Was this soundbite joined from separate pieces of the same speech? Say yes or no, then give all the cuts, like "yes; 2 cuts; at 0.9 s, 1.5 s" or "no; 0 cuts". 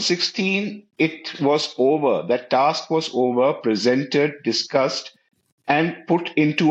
no; 0 cuts